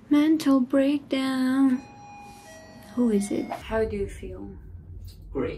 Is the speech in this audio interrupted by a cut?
yes; 1 cut; at 3.6 s

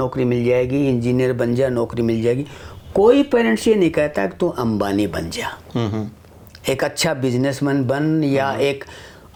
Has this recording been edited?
no; 0 cuts

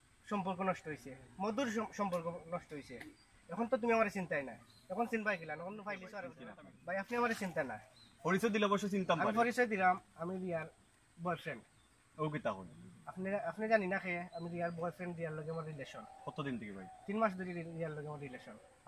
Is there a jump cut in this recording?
yes; 1 cut; at 6.4 s

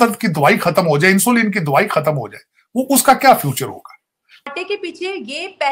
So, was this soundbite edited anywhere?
yes; 1 cut; at 4.5 s

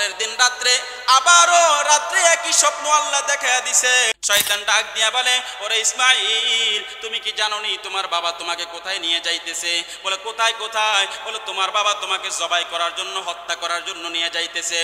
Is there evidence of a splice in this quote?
yes; 1 cut; at 4.2 s

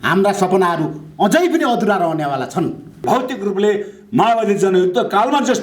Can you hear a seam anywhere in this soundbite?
yes; 1 cut; at 3.0 s

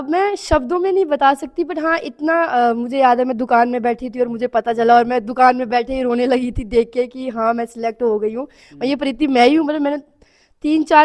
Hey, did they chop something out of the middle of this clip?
no; 0 cuts

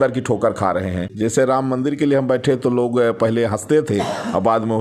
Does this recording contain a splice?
yes; 1 cut; at 1.1 s

